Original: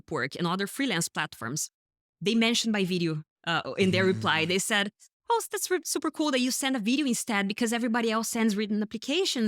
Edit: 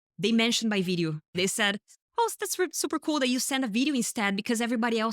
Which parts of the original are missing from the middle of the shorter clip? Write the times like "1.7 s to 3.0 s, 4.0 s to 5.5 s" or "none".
3.4 s to 4.4 s